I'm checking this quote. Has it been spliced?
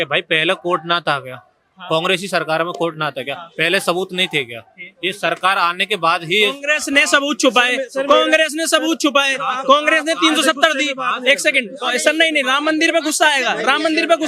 no; 0 cuts

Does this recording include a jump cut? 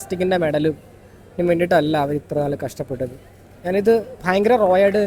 no; 0 cuts

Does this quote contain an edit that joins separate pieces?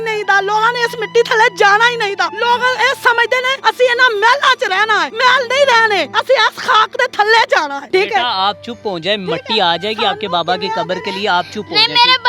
yes; 5 cuts; at 2.3 s, 3.5 s, 5.1 s, 6.1 s, 7.8 s

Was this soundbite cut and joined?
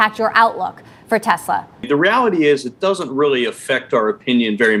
no; 0 cuts

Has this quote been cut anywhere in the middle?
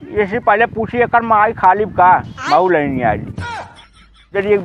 no; 0 cuts

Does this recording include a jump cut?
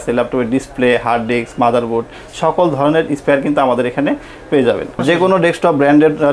yes; 1 cut; at 5.0 s

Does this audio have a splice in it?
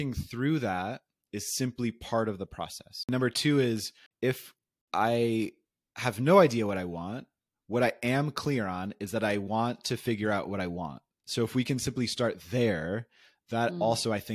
yes; 2 cuts; at 3.0 s, 4.4 s

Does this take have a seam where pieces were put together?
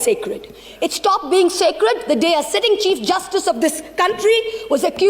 no; 0 cuts

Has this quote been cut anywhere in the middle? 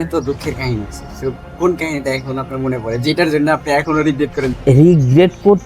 yes; 1 cut; at 4.5 s

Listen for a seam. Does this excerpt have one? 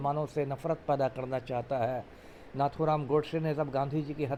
no; 0 cuts

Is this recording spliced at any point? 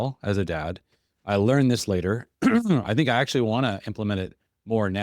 no; 0 cuts

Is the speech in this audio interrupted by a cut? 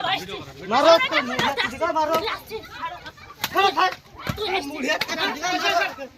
no; 0 cuts

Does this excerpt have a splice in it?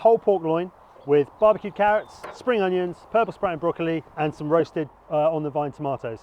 yes; 2 cuts; at 1.3 s, 4.1 s

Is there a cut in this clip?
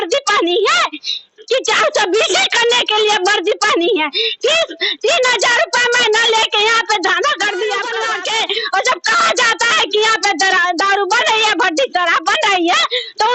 yes; 1 cut; at 8.0 s

